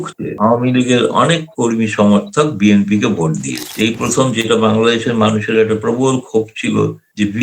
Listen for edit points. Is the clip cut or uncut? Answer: cut